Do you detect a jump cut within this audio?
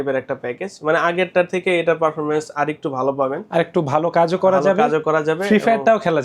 no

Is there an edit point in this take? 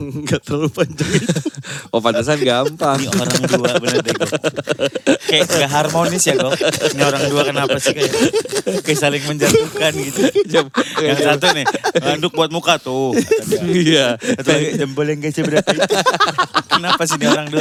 no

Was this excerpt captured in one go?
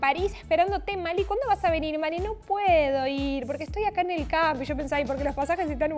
yes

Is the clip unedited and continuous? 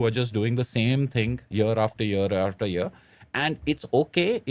yes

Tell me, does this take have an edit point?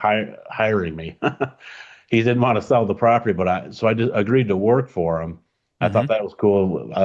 no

